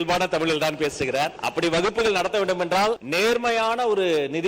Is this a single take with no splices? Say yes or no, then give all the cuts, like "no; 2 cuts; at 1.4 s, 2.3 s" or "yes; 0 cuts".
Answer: no; 2 cuts; at 1.4 s, 3.0 s